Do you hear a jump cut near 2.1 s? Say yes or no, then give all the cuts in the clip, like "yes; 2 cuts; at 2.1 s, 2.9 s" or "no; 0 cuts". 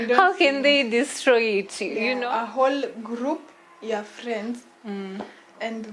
yes; 1 cut; at 2.1 s